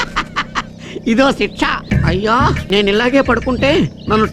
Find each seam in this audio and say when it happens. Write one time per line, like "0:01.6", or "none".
0:02.1